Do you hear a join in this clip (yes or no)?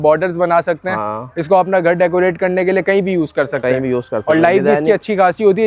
no